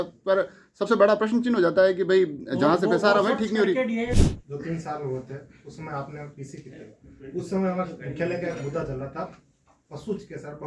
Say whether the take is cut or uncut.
cut